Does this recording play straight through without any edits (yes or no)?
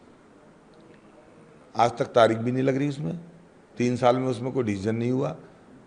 yes